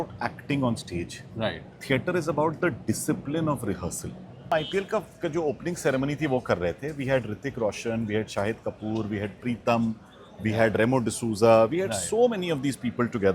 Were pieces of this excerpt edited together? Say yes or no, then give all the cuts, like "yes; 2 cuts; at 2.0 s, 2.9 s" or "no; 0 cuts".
yes; 1 cut; at 4.5 s